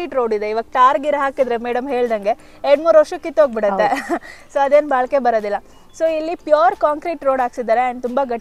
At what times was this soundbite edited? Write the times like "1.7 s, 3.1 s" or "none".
none